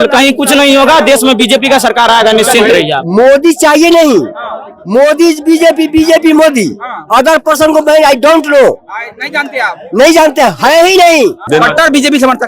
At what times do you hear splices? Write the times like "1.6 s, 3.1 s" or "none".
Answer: 3.0 s, 11.4 s